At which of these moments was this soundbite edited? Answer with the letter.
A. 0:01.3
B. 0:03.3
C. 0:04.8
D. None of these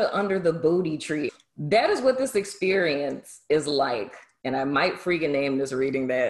A